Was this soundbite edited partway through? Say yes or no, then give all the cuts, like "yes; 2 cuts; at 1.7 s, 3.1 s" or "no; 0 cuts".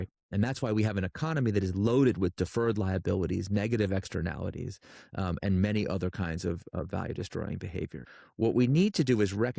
yes; 1 cut; at 8.1 s